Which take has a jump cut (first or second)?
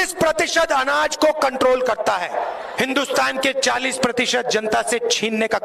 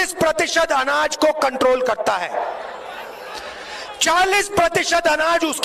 first